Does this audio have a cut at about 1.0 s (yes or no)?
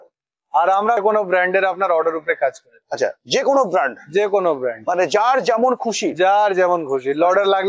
yes